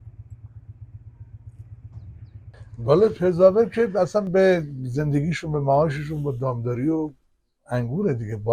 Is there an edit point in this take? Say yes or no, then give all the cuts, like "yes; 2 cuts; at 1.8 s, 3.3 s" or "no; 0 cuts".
yes; 1 cut; at 2.6 s